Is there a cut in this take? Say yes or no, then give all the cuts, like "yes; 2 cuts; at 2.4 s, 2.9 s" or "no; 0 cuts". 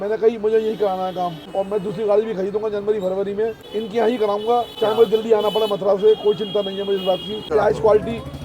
yes; 4 cuts; at 1.4 s, 3.6 s, 4.7 s, 7.4 s